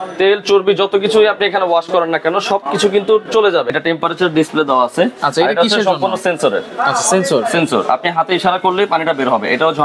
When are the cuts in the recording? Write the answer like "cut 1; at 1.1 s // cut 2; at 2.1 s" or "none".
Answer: cut 1; at 3.7 s